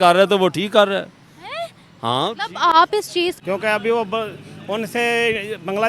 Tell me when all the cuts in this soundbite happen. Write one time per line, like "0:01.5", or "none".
0:03.4

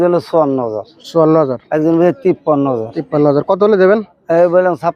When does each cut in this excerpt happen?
none

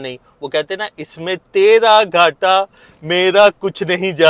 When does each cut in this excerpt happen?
none

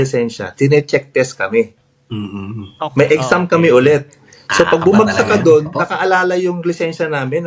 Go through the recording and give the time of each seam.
none

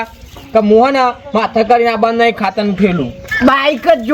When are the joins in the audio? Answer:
0:03.2

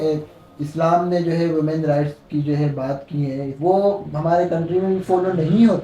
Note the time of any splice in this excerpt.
0:03.5

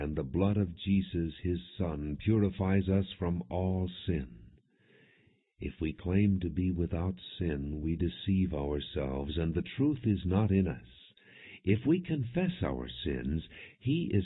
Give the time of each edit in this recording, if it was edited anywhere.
0:10.4

